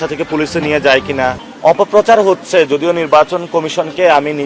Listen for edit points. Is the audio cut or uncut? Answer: cut